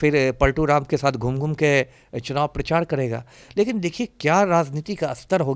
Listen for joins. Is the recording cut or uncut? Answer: uncut